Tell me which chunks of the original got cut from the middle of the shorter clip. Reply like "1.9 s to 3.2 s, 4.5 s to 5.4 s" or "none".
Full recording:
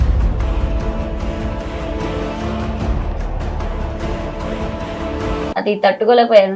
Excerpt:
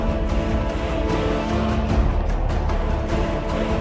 none